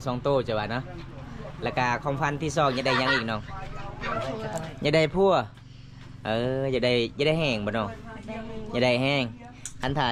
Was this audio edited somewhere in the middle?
no; 0 cuts

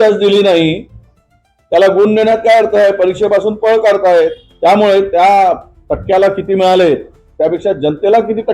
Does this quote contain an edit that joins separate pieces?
yes; 1 cut; at 4.5 s

